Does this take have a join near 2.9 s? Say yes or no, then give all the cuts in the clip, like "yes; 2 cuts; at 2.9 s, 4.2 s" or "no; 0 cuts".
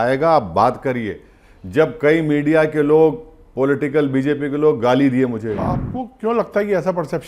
no; 1 cut; at 5.6 s